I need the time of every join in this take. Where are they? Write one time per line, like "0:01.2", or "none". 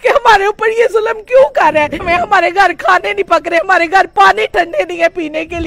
0:02.0